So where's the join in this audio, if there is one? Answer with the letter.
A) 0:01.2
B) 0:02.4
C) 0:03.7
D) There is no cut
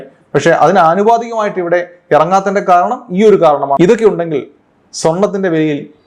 C